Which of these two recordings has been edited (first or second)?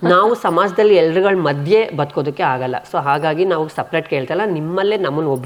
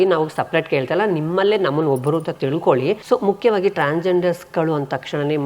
second